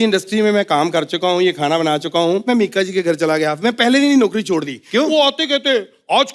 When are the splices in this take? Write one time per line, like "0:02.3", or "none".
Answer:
0:02.5